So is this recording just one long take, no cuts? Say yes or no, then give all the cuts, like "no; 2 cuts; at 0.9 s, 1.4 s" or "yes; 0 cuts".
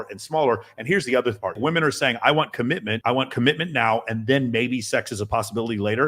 no; 2 cuts; at 1.6 s, 2.9 s